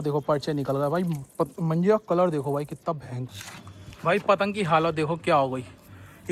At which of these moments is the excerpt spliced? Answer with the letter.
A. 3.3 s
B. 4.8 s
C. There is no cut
A